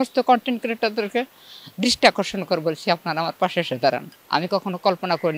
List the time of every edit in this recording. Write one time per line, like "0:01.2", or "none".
0:04.1